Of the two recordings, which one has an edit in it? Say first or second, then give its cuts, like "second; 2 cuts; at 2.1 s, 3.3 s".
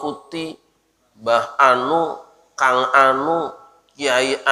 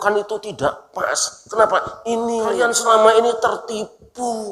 second; 1 cut; at 2.6 s